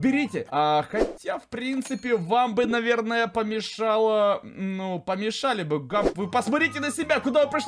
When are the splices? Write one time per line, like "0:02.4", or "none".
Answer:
none